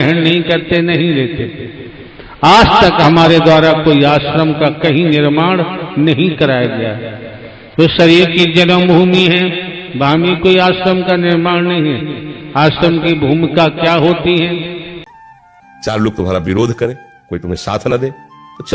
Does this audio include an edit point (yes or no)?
yes